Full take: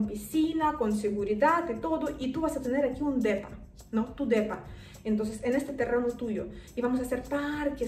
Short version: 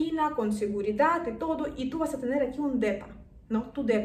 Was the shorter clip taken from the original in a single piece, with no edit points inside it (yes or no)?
yes